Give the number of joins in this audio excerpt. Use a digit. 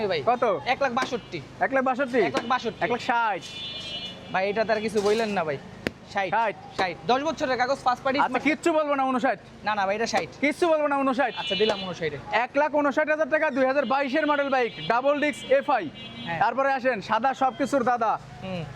0